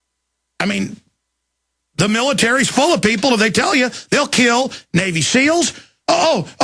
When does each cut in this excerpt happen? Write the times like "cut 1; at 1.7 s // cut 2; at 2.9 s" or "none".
cut 1; at 2.6 s